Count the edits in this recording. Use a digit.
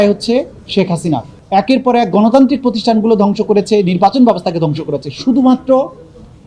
1